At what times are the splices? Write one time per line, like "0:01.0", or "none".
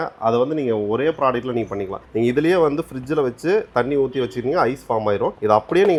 none